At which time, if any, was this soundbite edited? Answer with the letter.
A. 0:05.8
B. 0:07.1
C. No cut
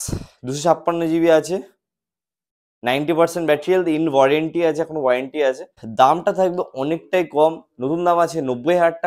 A